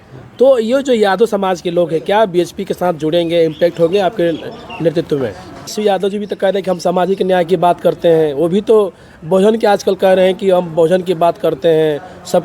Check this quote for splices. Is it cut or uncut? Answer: cut